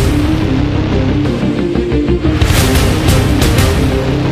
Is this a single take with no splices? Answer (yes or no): yes